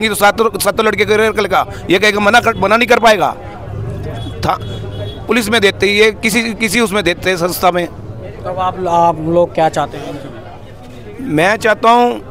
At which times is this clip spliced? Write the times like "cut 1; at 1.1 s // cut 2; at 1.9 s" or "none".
none